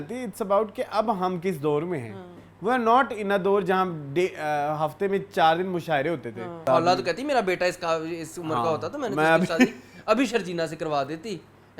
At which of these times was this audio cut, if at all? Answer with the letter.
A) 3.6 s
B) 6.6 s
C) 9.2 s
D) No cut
B